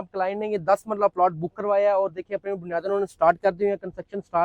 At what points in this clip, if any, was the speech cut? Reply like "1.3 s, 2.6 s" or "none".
none